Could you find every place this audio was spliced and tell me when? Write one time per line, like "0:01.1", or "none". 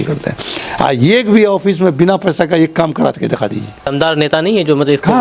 0:03.9

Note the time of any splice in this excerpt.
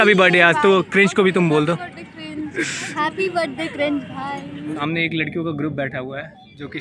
0:02.7
0:04.8

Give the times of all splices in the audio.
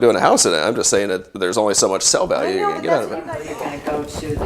0:03.3

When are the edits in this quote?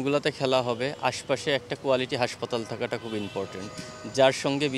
none

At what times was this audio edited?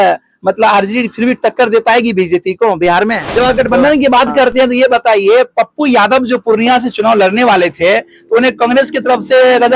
0:03.2

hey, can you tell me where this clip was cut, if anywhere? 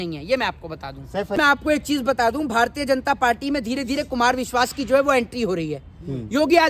0:01.4

